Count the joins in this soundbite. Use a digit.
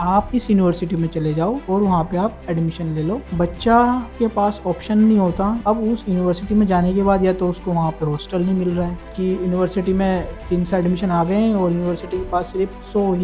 3